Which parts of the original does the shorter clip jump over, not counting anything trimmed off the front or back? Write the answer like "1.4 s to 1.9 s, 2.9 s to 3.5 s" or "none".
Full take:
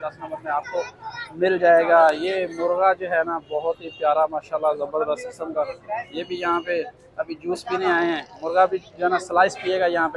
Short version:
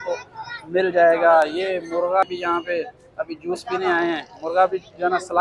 2.9 s to 6.2 s